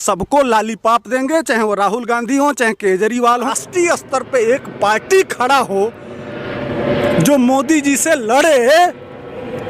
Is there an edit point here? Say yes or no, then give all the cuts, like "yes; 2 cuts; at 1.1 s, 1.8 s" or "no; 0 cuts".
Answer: yes; 1 cut; at 3.5 s